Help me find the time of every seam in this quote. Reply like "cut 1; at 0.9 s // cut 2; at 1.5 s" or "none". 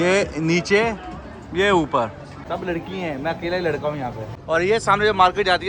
cut 1; at 2.3 s // cut 2; at 4.3 s